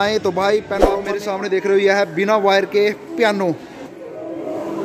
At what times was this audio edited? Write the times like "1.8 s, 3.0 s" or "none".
1.1 s, 3.7 s